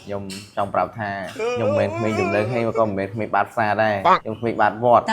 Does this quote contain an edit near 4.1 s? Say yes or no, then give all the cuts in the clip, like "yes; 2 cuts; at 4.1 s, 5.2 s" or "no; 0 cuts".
yes; 2 cuts; at 2.0 s, 4.1 s